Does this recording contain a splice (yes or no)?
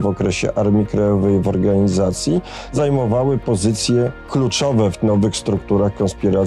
yes